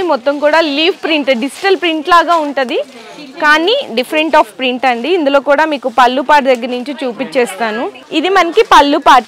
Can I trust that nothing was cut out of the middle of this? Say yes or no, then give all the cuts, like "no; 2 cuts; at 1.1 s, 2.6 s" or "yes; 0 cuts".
yes; 0 cuts